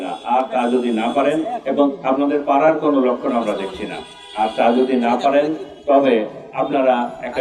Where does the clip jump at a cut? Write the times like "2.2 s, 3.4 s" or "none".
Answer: none